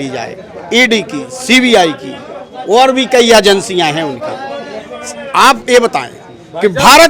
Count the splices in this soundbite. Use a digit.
0